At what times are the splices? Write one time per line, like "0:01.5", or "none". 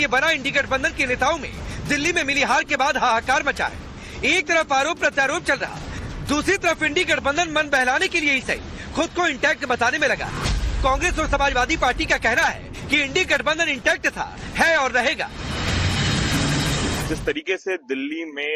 none